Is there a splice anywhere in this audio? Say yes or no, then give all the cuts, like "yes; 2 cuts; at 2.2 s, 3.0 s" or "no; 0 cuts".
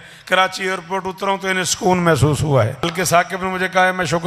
yes; 1 cut; at 2.8 s